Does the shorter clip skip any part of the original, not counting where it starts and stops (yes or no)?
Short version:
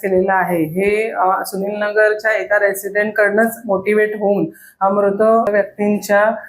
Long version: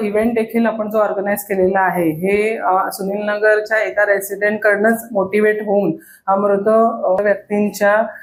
yes